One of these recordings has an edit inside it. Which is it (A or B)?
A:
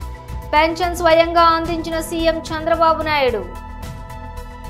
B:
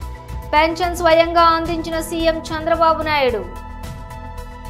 A